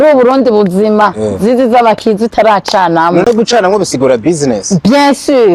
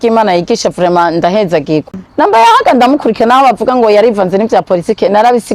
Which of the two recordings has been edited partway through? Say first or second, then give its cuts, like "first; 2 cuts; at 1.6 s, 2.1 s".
second; 1 cut; at 2.0 s